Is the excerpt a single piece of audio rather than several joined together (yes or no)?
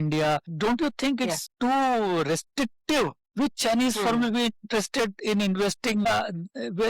no